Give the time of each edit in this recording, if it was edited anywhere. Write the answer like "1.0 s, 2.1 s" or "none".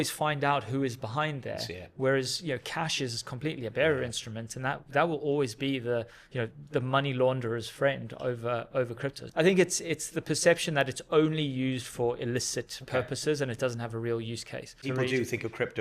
9.2 s, 14.9 s